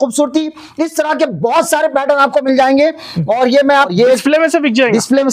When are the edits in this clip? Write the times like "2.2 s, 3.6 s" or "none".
3.9 s